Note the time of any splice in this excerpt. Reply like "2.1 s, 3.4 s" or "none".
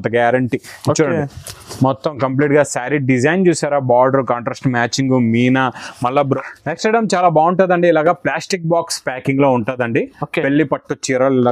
6.4 s